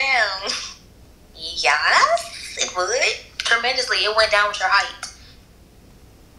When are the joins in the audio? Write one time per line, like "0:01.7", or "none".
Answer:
none